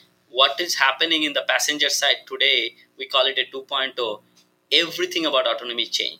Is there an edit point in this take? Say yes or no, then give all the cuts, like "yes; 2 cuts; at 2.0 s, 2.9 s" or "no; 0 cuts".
no; 0 cuts